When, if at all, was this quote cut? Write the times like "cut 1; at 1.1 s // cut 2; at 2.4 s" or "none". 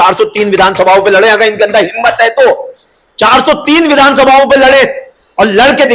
none